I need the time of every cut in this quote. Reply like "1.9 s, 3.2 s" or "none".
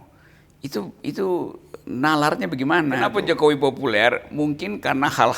3.1 s